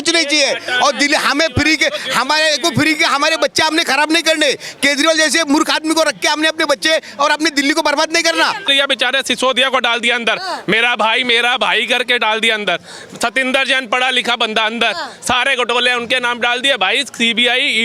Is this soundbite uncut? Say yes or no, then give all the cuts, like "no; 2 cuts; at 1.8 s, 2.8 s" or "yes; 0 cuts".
no; 1 cut; at 8.6 s